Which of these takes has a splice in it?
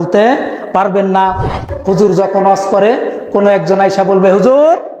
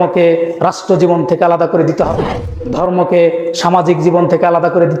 first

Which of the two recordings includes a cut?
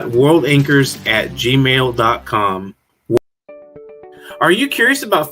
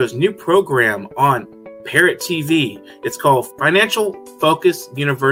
first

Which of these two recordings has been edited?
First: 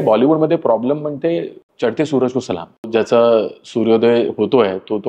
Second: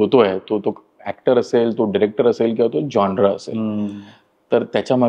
first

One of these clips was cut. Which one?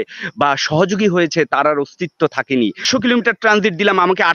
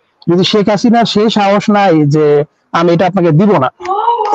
first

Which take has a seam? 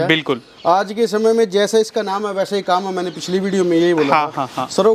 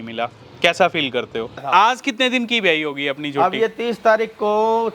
second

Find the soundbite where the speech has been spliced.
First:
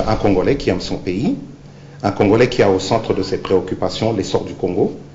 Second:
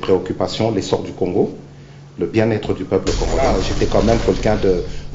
second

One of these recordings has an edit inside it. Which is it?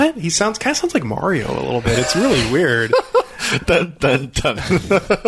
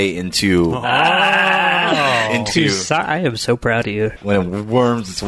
second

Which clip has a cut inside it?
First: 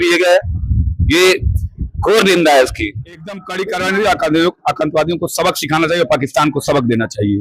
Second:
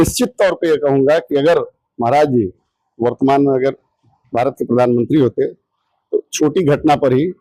first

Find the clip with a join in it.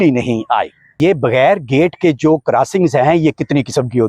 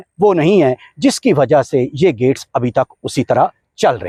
first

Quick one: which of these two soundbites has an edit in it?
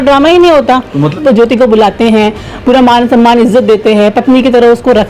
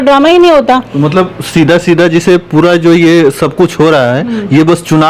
first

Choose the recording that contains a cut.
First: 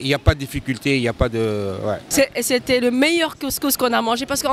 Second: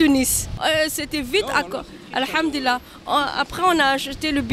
first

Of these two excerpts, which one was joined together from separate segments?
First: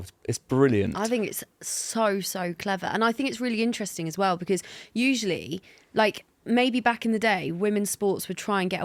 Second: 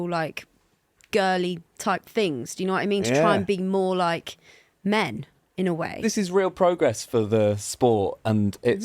second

